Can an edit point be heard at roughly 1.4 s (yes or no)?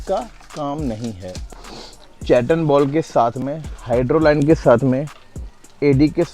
yes